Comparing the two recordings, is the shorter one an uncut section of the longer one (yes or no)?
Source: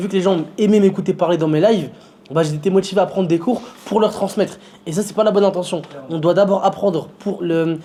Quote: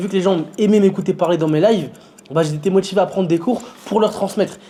yes